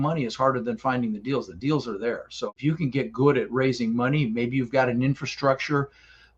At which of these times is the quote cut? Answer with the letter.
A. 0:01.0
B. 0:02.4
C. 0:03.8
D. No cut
B